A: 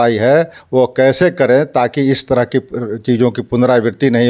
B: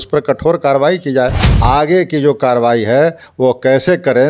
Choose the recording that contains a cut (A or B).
B